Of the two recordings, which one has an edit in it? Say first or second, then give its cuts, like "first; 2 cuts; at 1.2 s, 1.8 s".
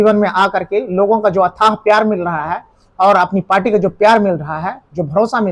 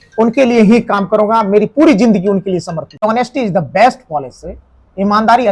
second; 1 cut; at 2.8 s